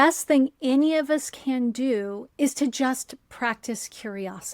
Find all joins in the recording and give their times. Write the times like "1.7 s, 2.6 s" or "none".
2.2 s